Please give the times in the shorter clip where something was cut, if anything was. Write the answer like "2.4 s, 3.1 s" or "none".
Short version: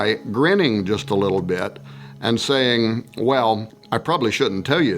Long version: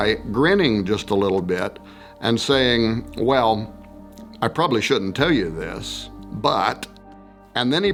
3.7 s